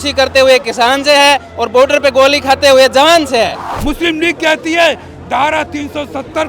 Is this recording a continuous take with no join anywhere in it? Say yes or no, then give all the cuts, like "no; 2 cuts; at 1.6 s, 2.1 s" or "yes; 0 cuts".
no; 1 cut; at 3.7 s